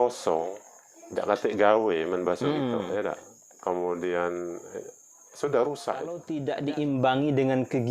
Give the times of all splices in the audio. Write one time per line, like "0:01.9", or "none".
0:06.3